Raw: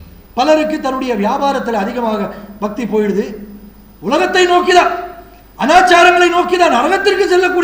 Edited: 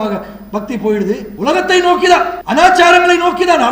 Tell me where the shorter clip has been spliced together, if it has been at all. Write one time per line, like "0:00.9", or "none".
0:01.3
0:02.4